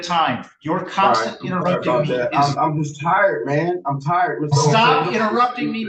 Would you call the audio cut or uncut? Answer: uncut